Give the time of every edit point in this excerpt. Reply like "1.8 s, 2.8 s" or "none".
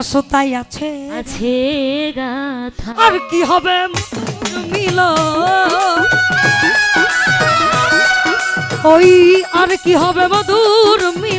none